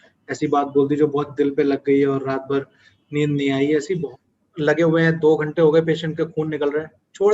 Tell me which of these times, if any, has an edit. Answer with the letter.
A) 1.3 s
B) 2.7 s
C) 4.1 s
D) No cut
C